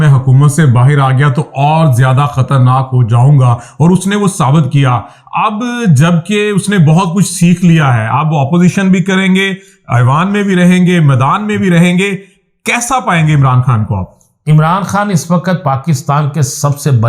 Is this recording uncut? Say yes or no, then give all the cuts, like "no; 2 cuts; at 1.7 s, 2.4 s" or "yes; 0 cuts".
yes; 0 cuts